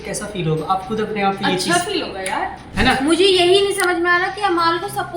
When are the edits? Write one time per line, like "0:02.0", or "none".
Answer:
0:02.6

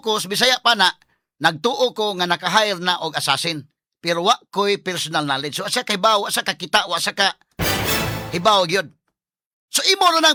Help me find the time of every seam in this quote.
none

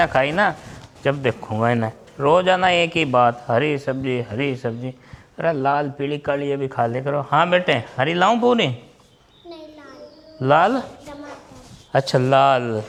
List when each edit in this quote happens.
none

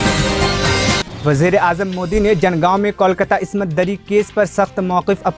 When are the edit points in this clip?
none

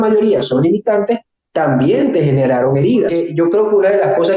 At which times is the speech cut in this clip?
0:03.2

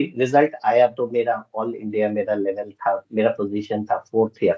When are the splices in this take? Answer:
none

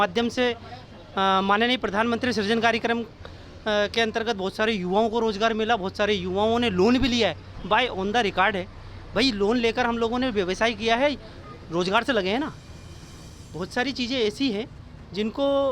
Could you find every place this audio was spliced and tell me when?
none

